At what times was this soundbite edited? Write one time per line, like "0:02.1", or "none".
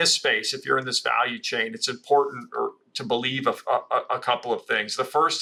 none